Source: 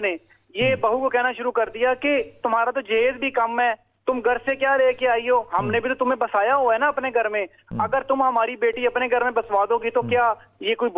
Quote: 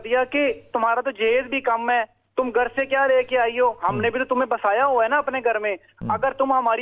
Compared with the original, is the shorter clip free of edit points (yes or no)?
yes